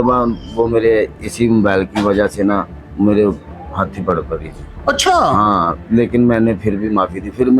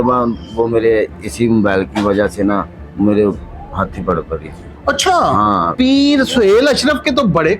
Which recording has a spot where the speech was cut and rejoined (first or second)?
second